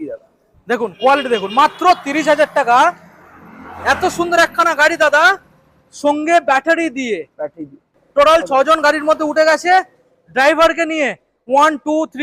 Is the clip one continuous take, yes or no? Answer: no